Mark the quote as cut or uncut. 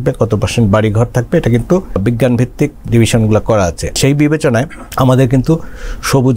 cut